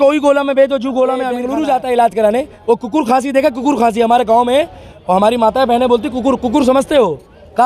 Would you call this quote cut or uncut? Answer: cut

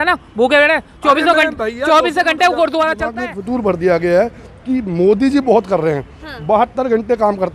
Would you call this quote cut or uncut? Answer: cut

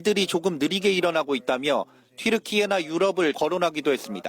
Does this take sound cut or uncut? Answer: cut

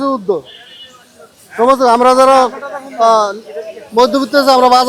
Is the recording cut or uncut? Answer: uncut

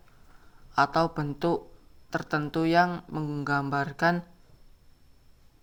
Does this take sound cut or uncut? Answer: uncut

